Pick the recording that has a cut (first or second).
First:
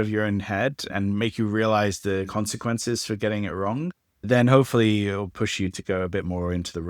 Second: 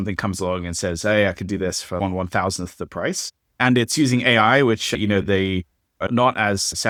first